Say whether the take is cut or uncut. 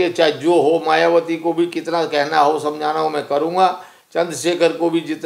uncut